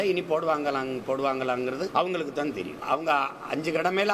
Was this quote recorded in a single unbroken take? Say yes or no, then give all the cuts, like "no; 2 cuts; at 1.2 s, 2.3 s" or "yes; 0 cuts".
no; 2 cuts; at 1.9 s, 2.7 s